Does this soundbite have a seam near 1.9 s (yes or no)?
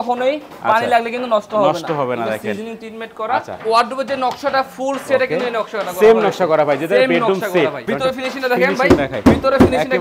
no